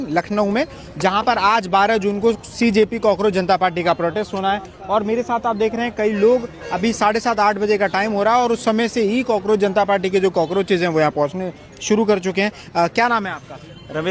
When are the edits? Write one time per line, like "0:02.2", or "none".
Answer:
none